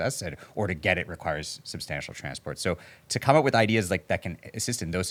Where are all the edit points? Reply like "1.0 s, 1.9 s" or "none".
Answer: none